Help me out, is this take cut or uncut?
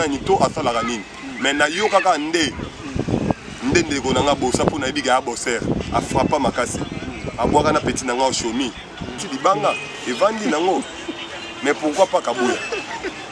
cut